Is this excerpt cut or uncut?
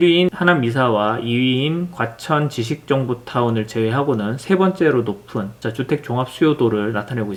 uncut